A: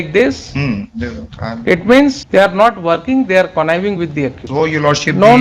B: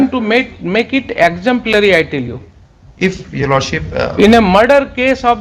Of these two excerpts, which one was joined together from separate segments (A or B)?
A